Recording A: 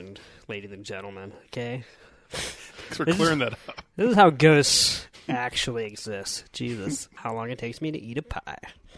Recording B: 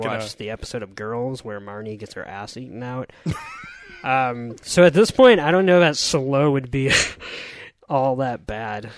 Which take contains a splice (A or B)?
A